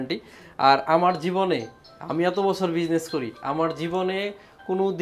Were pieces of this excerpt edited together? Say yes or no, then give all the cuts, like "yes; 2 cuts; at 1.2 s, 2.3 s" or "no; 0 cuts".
no; 0 cuts